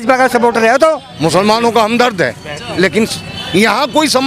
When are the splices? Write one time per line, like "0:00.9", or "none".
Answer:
0:01.1